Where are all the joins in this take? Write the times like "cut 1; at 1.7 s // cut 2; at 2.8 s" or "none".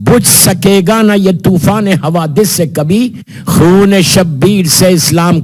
none